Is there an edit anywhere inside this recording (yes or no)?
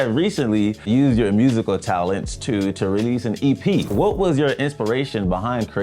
yes